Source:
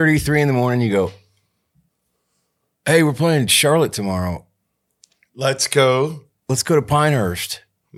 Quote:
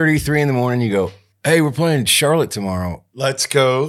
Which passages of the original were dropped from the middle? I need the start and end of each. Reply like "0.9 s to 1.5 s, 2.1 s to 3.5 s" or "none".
1.3 s to 2.7 s, 4.4 s to 5.2 s